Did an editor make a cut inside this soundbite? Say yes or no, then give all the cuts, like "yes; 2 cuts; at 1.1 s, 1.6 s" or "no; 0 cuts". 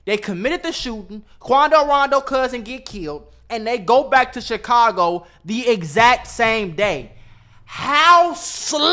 no; 0 cuts